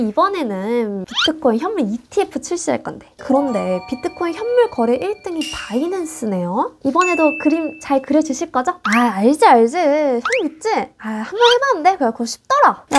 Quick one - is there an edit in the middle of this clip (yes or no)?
yes